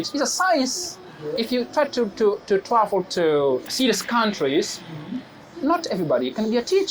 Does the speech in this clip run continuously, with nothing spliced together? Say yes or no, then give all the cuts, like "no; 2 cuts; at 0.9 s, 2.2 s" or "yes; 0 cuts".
no; 2 cuts; at 1.3 s, 3.7 s